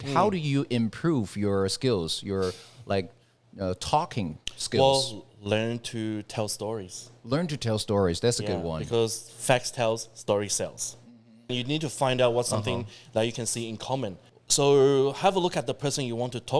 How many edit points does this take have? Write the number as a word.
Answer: two